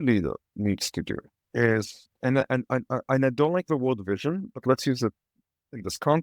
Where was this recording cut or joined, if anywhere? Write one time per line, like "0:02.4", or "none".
0:01.3
0:02.0